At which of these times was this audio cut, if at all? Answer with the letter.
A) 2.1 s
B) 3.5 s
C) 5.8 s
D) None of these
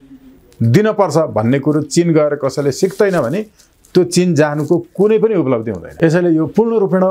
C